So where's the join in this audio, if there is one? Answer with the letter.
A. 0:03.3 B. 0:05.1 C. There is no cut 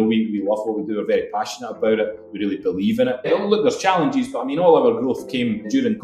A